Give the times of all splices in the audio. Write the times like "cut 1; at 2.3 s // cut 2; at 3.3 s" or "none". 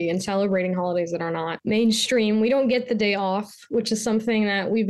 cut 1; at 1.5 s